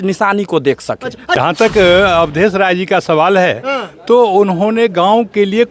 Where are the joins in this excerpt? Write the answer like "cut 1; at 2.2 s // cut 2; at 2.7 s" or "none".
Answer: cut 1; at 1.4 s